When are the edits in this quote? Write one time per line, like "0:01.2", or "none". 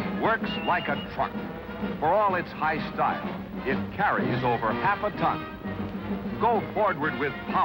none